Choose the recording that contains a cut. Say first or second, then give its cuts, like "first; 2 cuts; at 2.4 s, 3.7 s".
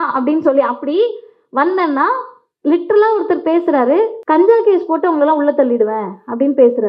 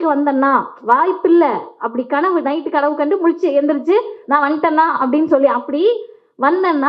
first; 1 cut; at 4.2 s